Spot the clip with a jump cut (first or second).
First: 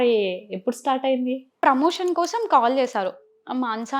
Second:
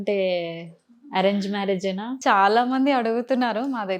first